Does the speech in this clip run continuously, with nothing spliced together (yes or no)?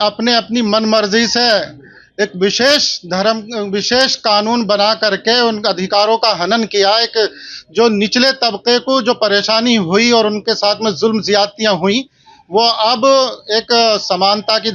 yes